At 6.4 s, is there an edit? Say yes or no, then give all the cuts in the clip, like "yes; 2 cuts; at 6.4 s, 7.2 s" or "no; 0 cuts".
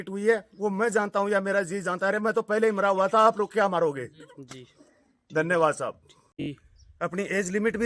yes; 1 cut; at 6.4 s